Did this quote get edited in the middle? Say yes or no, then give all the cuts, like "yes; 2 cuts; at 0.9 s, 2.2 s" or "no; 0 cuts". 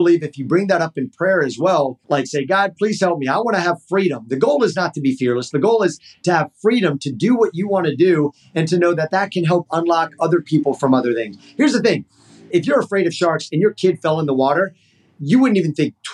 yes; 3 cuts; at 2.0 s, 12.5 s, 15.1 s